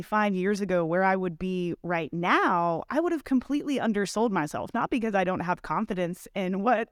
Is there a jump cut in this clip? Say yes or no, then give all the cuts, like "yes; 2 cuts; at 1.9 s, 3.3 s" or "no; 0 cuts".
no; 0 cuts